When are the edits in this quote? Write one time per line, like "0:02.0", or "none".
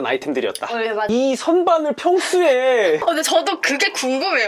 0:01.1